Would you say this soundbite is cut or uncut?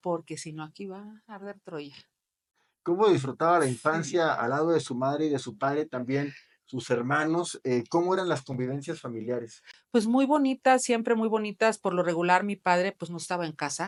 uncut